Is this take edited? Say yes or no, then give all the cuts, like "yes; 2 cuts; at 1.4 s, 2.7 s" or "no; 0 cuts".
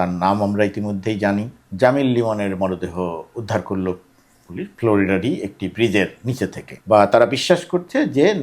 yes; 2 cuts; at 1.6 s, 6.7 s